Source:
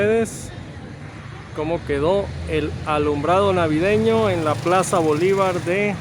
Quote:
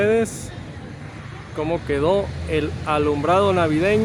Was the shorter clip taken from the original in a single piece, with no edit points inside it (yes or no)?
yes